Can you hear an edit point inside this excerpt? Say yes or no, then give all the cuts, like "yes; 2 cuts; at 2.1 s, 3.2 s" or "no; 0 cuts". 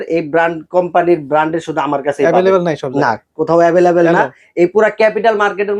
no; 0 cuts